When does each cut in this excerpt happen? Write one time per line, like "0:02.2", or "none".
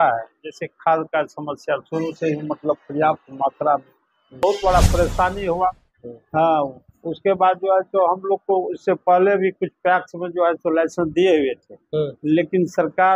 0:04.4